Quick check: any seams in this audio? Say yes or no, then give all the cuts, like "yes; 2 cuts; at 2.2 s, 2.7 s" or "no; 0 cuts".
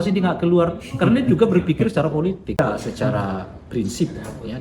yes; 1 cut; at 2.6 s